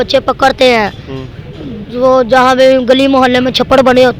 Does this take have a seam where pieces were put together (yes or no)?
no